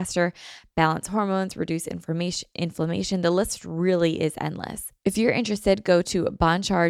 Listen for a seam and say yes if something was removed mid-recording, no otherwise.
yes